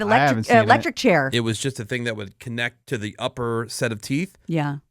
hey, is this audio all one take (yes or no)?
no